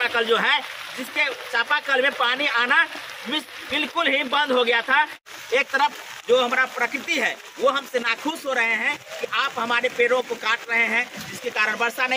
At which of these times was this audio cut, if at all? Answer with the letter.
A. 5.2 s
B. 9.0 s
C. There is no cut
A